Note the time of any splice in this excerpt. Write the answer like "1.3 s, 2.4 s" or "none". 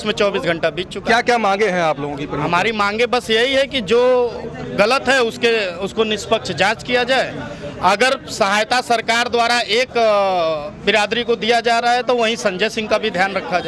none